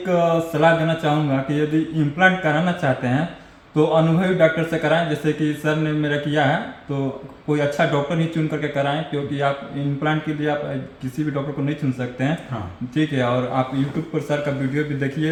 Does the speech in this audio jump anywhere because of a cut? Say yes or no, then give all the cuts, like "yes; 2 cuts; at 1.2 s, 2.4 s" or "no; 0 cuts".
no; 0 cuts